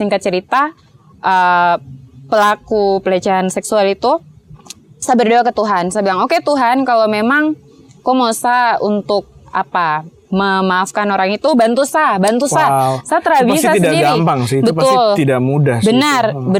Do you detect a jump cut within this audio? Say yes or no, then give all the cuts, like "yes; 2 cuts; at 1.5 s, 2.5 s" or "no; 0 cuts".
no; 0 cuts